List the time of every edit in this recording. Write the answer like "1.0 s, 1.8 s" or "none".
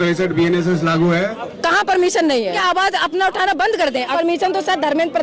1.4 s, 2.6 s, 4.1 s